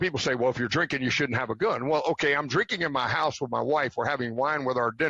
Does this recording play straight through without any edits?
yes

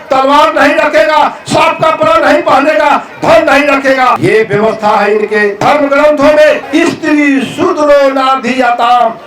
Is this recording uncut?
no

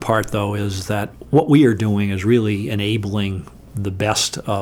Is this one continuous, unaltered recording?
no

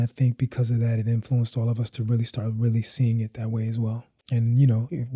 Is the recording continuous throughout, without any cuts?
no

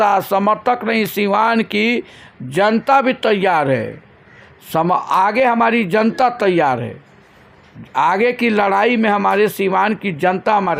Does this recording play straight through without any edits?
yes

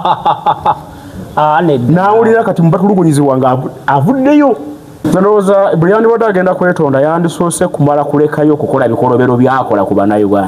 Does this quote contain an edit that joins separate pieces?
yes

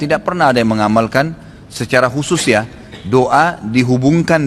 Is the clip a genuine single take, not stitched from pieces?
yes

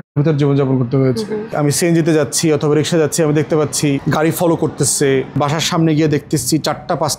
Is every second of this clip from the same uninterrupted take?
no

